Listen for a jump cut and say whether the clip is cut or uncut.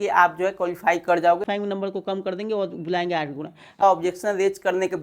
cut